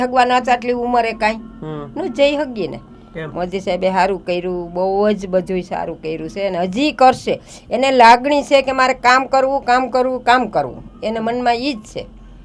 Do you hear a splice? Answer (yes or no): no